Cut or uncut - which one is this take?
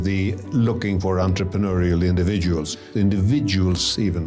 cut